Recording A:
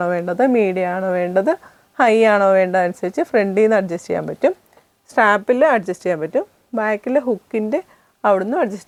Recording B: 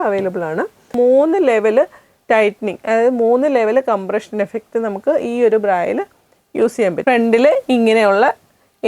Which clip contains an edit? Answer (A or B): B